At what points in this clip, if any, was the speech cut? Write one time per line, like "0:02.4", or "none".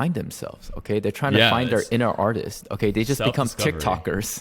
none